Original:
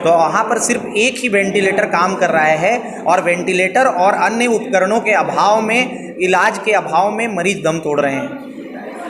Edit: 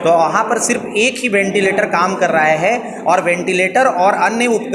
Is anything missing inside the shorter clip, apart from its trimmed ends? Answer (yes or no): no